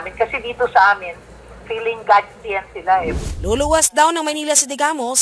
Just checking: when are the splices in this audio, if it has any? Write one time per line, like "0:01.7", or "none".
0:03.1